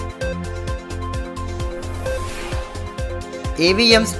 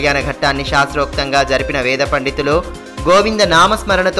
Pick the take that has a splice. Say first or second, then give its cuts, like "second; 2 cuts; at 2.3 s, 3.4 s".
first; 1 cut; at 1.7 s